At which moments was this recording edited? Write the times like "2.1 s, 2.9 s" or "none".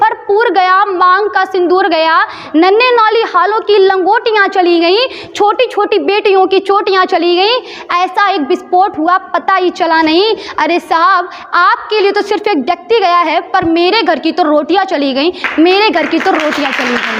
none